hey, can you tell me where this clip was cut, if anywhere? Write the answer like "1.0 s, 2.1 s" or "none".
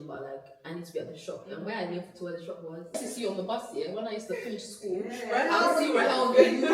3.0 s